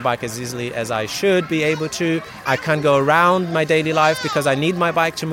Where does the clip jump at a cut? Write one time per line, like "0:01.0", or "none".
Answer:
0:02.4

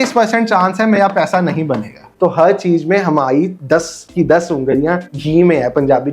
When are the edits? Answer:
0:02.0
0:03.6
0:05.1

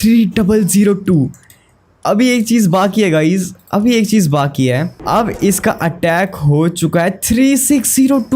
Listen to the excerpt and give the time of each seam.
0:04.9

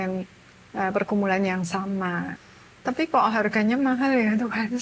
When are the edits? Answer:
0:02.3

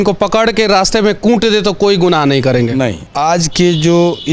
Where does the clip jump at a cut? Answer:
0:03.1

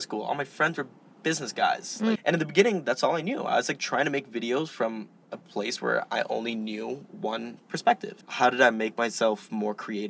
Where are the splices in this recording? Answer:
0:02.2
0:08.1

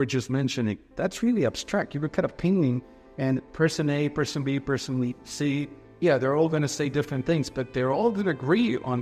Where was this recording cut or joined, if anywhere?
none

